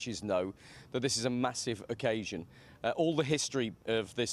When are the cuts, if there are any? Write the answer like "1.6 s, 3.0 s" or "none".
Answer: none